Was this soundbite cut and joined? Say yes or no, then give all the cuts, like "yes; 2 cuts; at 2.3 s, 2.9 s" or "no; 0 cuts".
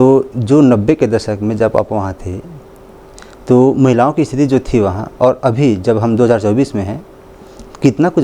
no; 0 cuts